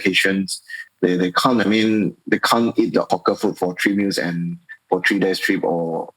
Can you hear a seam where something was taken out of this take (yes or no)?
yes